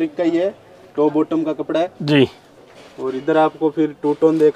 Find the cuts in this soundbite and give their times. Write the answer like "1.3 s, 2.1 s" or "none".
none